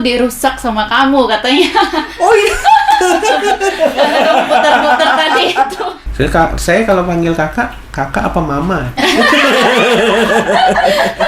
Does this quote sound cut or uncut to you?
cut